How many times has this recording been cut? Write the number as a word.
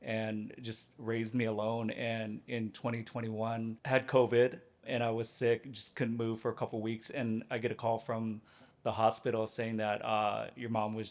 two